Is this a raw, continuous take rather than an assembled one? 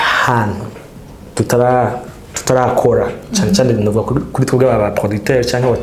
yes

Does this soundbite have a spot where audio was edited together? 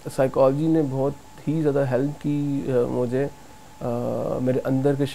no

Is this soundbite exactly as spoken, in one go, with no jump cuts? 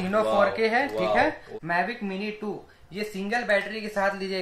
no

